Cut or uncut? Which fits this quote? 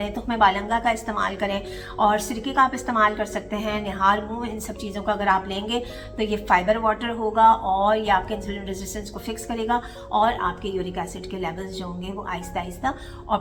uncut